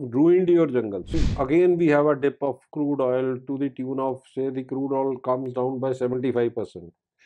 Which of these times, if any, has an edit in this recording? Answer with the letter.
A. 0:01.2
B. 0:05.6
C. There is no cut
A